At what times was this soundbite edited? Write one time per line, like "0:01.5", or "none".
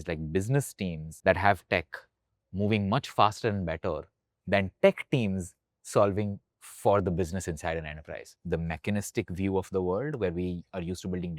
0:01.1
0:08.3

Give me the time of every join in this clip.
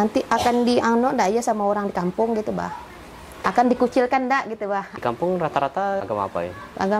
none

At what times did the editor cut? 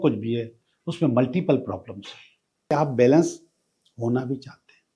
0:02.7

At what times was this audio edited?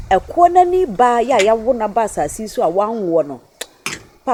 none

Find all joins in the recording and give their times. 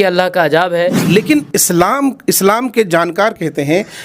0:01.0

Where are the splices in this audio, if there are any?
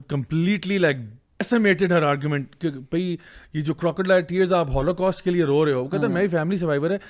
0:01.4

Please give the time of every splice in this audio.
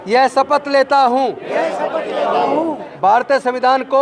0:02.9

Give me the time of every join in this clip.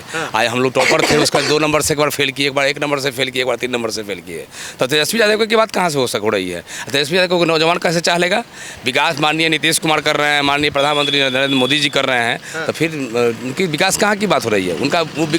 none

